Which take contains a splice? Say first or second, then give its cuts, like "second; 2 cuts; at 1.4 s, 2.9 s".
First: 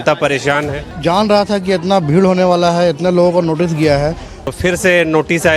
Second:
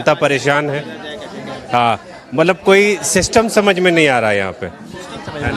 first; 2 cuts; at 0.9 s, 4.3 s